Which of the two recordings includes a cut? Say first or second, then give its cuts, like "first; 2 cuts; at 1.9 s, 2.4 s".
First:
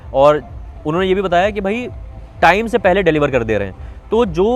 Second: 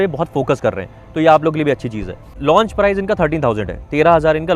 second; 1 cut; at 2.3 s